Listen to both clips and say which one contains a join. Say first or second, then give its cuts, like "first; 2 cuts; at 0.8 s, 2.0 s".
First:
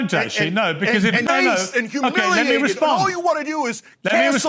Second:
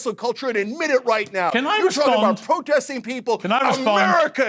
first; 1 cut; at 1.2 s